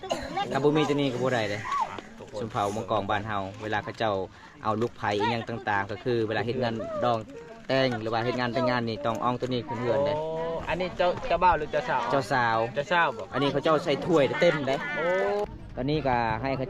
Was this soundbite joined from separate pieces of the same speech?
yes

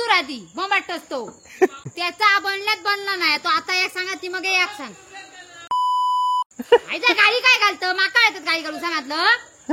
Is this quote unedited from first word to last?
no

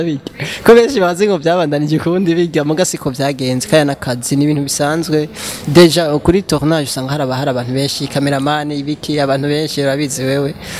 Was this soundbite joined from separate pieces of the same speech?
no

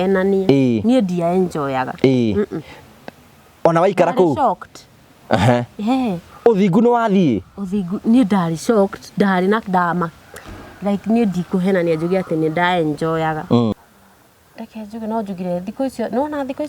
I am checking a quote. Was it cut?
yes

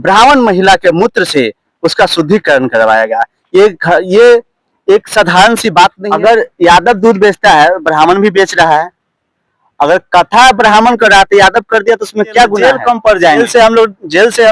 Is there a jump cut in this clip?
yes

